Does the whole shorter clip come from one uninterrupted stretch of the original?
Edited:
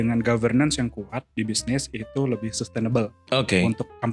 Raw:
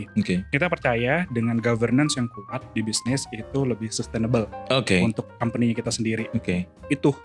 yes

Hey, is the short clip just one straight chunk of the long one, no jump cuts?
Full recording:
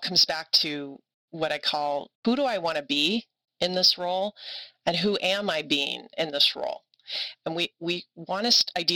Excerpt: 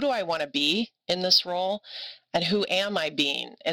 no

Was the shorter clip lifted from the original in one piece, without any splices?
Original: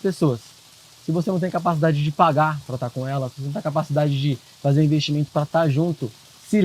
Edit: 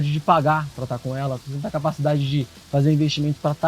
yes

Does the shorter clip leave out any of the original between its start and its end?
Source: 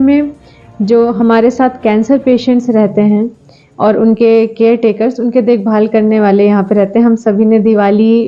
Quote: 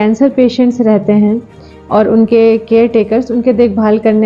no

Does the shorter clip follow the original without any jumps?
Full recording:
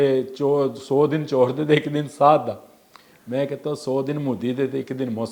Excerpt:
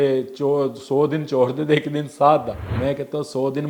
no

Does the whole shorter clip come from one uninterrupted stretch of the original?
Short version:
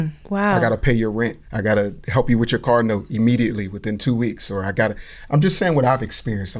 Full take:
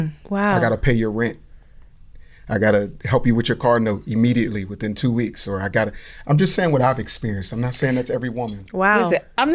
no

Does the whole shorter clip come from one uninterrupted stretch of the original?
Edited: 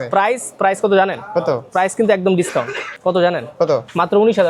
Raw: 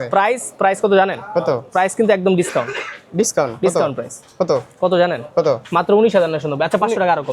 no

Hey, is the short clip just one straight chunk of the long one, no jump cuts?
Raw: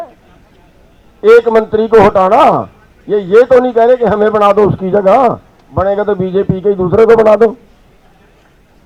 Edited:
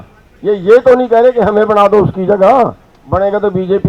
yes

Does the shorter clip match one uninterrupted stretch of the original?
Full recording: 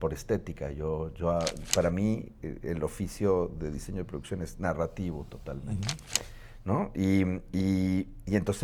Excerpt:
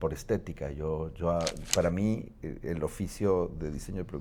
yes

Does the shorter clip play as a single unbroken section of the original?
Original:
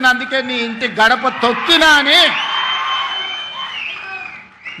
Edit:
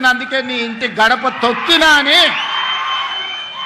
yes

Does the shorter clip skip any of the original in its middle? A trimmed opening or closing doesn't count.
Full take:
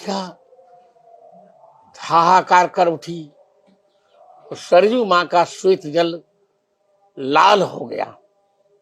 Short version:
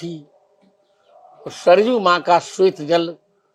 no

